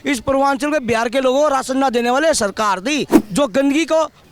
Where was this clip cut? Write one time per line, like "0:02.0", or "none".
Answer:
0:03.1